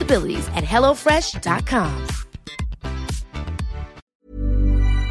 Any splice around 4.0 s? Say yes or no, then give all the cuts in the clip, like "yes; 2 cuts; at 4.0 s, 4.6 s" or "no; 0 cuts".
yes; 1 cut; at 4.0 s